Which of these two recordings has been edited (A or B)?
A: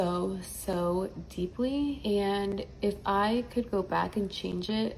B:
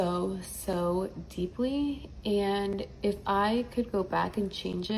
A